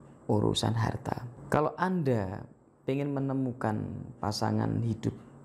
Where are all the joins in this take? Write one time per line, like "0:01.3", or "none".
0:01.3